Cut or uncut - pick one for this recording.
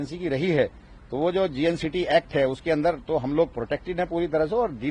uncut